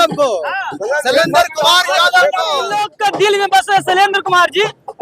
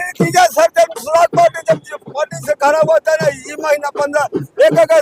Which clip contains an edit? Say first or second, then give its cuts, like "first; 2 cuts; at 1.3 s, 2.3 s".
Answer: first; 1 cut; at 2.9 s